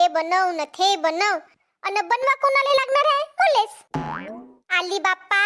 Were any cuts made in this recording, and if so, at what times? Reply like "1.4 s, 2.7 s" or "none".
3.8 s